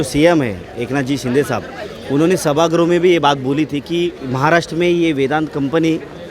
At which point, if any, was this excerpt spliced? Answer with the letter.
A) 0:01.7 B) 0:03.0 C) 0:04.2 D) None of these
C